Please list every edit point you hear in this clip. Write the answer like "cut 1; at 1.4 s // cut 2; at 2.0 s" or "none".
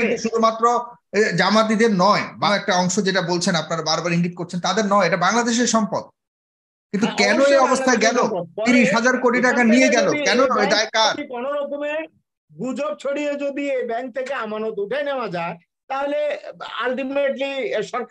cut 1; at 2.5 s